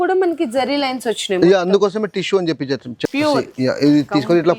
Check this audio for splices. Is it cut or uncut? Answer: cut